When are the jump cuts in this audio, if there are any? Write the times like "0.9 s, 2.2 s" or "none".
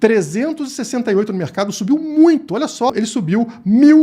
2.9 s